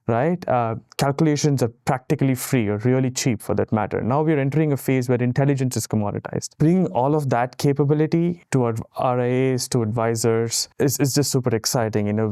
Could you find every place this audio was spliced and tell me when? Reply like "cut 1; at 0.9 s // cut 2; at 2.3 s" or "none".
cut 1; at 6.4 s // cut 2; at 8.4 s // cut 3; at 10.6 s